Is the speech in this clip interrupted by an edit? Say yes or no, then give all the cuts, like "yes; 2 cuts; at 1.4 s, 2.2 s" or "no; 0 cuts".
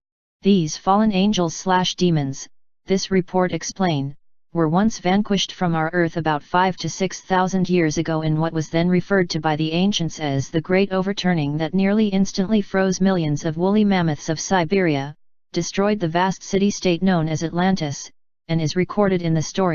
no; 0 cuts